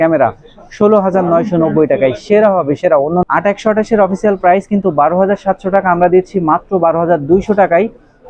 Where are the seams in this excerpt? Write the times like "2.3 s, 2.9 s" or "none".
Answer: 3.2 s